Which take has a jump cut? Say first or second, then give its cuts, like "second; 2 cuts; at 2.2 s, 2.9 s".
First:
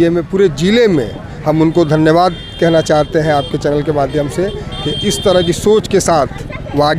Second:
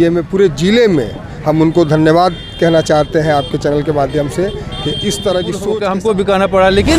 second; 1 cut; at 5.8 s